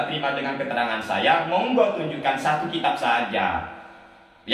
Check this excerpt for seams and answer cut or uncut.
uncut